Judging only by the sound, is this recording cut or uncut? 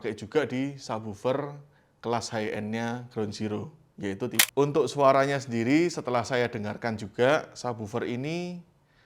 cut